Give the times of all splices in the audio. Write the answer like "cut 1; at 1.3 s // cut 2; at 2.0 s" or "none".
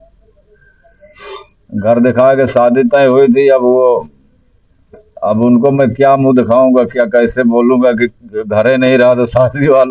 none